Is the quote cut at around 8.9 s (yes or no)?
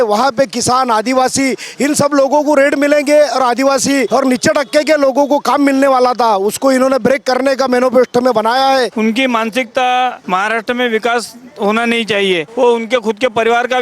yes